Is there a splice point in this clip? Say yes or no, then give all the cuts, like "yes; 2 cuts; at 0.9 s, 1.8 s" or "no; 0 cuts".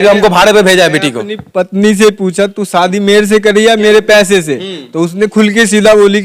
no; 0 cuts